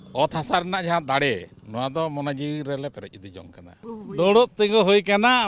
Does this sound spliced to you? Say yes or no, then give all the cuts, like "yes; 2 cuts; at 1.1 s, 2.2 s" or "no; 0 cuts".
yes; 1 cut; at 3.8 s